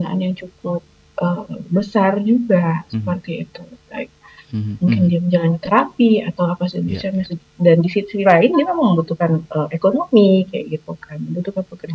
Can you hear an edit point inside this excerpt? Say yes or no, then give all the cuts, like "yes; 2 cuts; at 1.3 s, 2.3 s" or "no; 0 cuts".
no; 0 cuts